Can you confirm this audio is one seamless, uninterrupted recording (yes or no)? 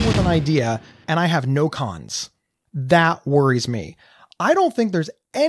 no